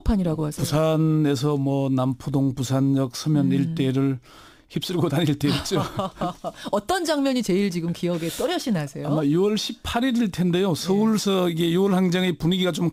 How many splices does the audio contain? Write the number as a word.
zero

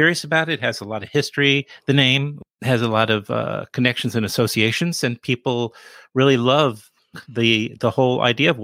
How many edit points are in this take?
one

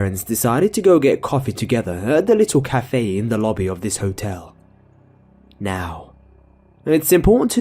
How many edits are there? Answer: one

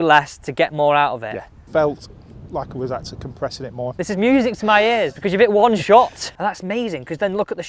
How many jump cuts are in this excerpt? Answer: three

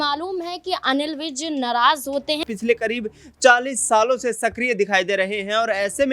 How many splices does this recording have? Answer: one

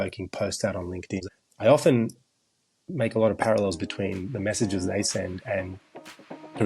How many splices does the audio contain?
one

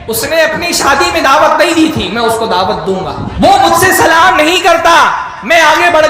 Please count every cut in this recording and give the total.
one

